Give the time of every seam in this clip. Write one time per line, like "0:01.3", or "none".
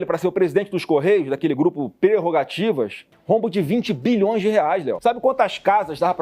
0:03.1
0:04.9